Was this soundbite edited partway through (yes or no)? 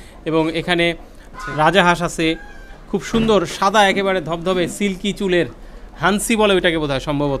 no